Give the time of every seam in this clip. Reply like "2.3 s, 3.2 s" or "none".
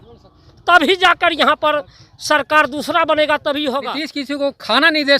3.9 s